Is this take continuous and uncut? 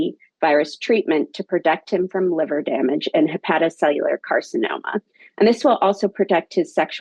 yes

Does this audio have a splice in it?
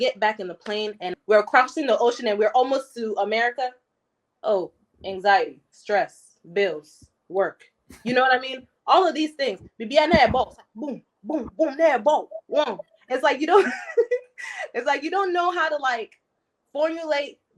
yes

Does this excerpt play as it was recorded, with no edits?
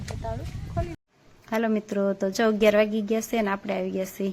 no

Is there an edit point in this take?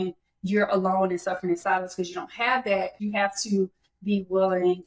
yes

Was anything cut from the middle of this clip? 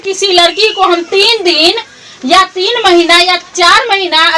no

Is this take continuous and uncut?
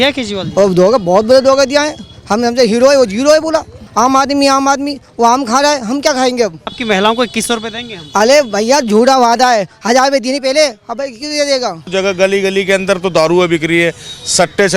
no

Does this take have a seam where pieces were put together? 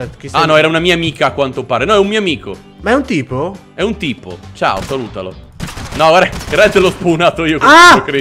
no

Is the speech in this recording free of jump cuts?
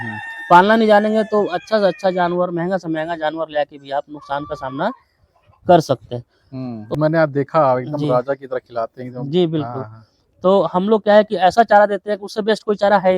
no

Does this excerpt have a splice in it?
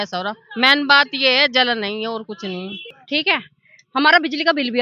yes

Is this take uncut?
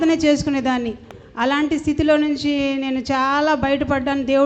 no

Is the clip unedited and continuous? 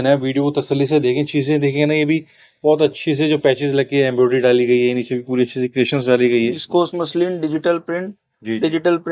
no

